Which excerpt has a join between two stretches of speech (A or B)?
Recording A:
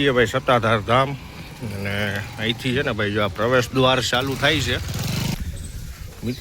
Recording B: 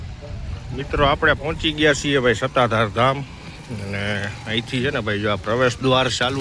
A